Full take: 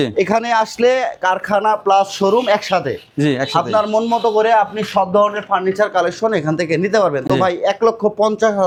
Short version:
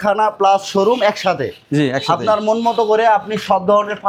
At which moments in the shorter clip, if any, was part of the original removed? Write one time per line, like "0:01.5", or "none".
none